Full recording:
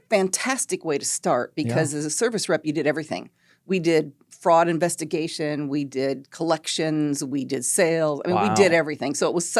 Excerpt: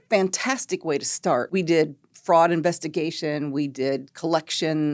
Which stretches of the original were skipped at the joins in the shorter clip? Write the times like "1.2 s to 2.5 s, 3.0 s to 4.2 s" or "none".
1.5 s to 3.6 s